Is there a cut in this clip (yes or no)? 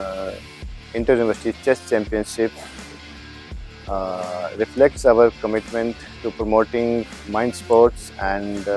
no